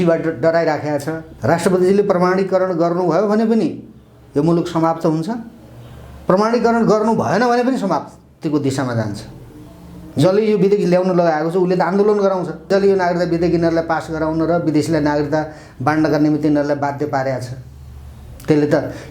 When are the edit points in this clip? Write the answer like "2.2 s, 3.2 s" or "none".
1.2 s, 12.7 s

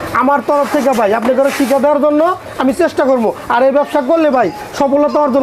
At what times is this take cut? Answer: none

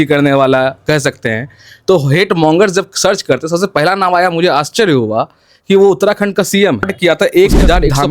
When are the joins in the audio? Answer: 6.9 s

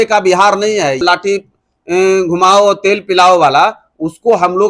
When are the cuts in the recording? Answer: 1.0 s

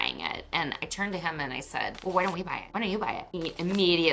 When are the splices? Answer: 2.0 s, 2.6 s, 3.3 s

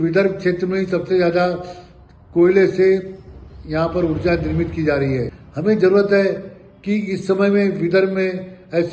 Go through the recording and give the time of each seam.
5.4 s

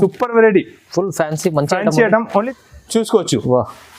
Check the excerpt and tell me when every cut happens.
2.5 s

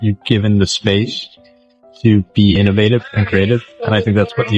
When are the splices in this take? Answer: none

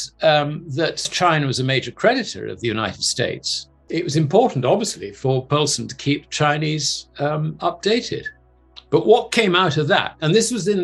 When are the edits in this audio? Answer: 1.1 s, 3.7 s

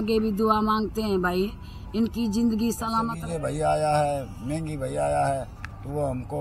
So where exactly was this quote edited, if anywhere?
3.1 s

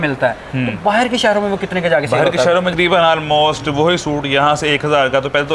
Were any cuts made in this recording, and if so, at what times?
2.7 s

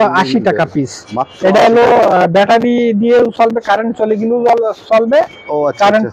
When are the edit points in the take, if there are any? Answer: none

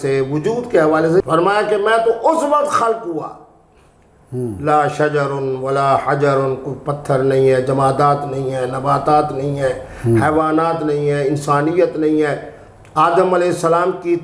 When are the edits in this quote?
1.2 s

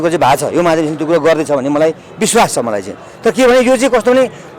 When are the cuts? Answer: none

